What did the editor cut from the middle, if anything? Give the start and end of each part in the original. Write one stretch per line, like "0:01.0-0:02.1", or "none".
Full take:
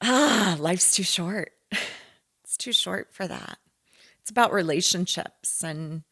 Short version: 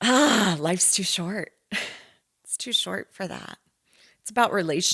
none